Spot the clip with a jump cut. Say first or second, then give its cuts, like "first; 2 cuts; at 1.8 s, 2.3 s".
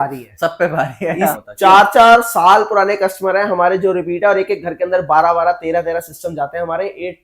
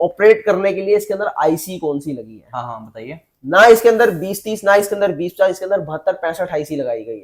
first; 1 cut; at 1.3 s